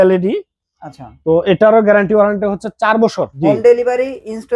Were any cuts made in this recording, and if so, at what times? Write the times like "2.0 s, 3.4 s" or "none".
3.3 s